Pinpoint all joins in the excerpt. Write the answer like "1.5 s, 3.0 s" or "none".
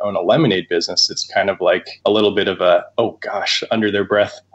1.9 s, 2.9 s